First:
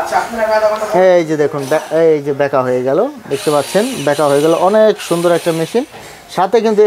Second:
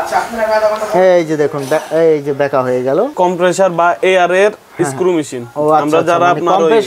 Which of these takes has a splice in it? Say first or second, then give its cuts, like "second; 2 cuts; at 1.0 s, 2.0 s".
second; 1 cut; at 3.1 s